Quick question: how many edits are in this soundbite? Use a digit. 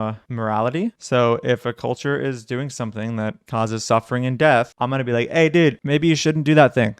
2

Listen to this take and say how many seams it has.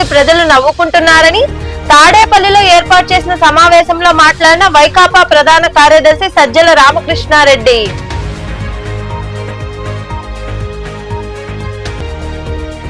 0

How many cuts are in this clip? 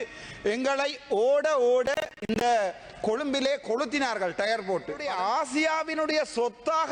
1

